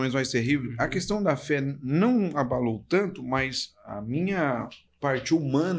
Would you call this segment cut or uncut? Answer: uncut